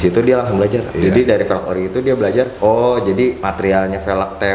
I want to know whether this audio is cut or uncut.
cut